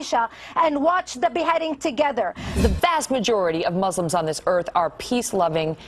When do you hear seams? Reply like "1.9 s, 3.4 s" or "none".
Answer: 2.6 s